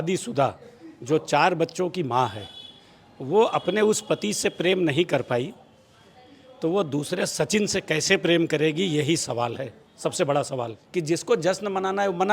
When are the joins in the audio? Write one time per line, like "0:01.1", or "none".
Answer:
0:10.8